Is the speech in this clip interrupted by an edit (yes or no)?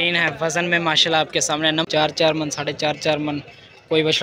yes